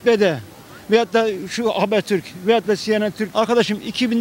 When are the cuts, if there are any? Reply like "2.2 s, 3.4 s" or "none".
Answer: 3.2 s

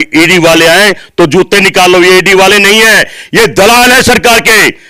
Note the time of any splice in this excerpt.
none

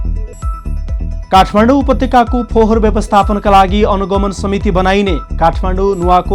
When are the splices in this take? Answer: 1.2 s

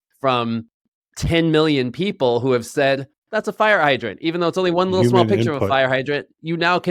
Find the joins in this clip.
none

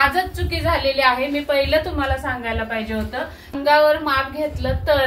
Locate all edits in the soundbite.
3.5 s

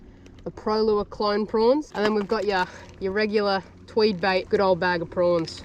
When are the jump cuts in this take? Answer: 1.9 s, 4.5 s

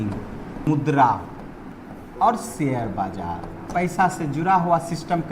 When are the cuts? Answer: 0.7 s, 1.7 s, 3.7 s

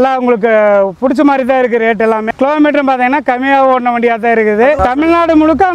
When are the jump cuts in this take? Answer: 2.2 s

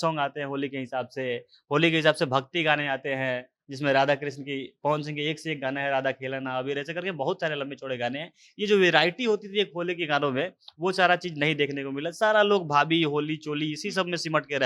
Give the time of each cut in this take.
none

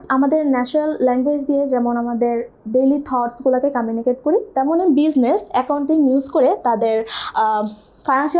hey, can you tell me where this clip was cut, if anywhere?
none

